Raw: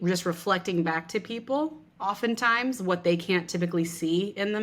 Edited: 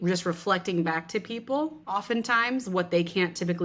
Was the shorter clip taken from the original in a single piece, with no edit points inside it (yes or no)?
no